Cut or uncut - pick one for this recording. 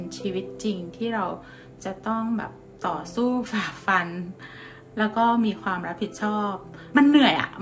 cut